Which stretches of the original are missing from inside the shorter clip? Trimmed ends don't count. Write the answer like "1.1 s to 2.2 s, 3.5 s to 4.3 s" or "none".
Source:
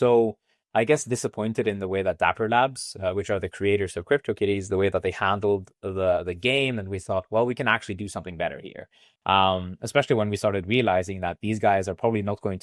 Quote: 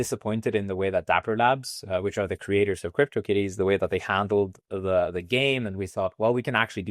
none